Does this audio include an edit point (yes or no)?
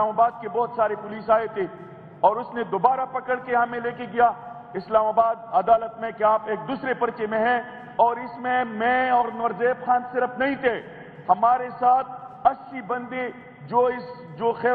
no